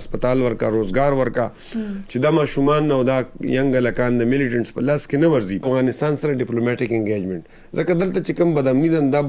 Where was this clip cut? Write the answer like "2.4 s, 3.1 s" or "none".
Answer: 5.7 s